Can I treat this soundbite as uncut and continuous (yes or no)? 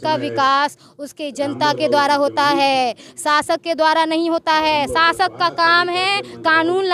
yes